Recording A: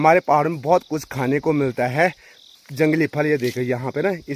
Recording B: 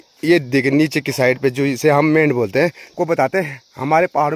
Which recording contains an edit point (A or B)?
B